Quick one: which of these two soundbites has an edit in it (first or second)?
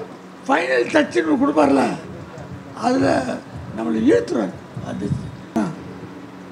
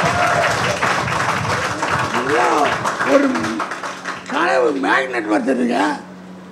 first